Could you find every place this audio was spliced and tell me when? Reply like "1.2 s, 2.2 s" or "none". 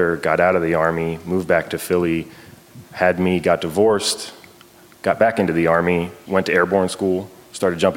6.2 s